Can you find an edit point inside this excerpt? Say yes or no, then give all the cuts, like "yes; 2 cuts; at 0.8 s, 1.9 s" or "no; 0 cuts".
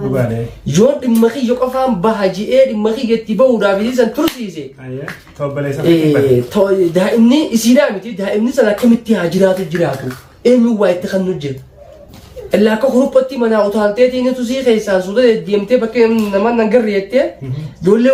no; 0 cuts